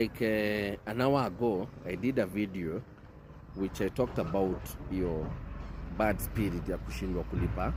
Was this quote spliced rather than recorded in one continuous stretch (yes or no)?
no